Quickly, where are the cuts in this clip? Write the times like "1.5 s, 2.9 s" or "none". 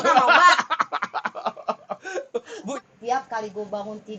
2.7 s